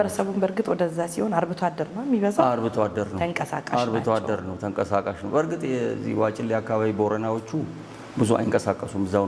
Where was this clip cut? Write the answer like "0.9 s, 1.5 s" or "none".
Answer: none